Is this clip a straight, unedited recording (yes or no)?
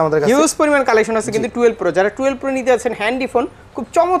yes